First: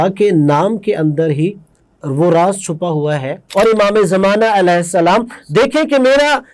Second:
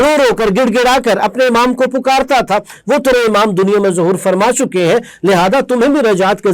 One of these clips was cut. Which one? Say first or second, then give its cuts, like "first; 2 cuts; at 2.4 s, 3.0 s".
first; 1 cut; at 3.4 s